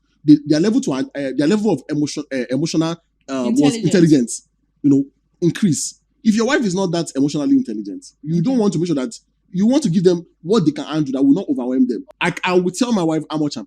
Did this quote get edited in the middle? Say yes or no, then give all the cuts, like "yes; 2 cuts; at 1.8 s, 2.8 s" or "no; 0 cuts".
yes; 1 cut; at 12.1 s